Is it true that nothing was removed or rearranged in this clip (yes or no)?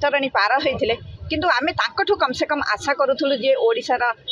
yes